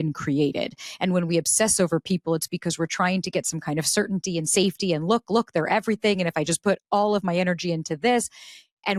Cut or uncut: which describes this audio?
uncut